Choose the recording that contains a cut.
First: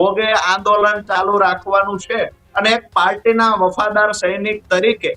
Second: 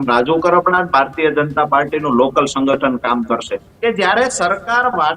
second; 1 cut; at 3.6 s

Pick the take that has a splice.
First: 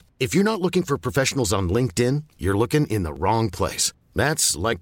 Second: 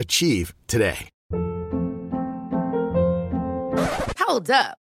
second; 1 cut; at 1.1 s

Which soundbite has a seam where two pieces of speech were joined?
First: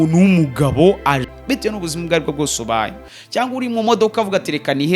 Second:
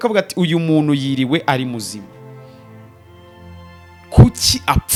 first; 1 cut; at 1.3 s

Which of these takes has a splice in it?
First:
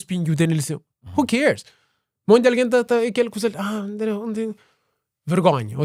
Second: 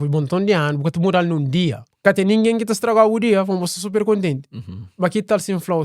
second; 1 cut; at 1.9 s

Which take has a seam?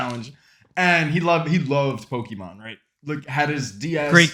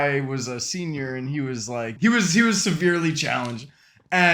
second; 1 cut; at 1.8 s

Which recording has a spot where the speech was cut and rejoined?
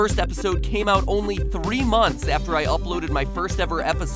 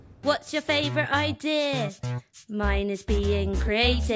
first; 1 cut; at 1.5 s

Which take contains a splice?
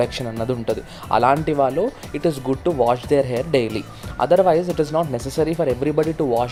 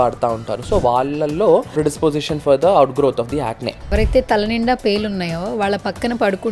second; 2 cuts; at 1.7 s, 3.9 s

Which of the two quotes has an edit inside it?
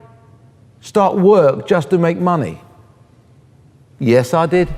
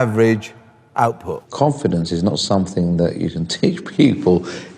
second; 1 cut; at 1.4 s

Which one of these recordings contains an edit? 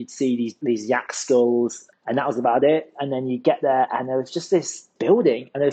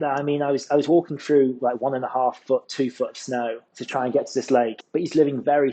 second; 2 cuts; at 3.6 s, 4.8 s

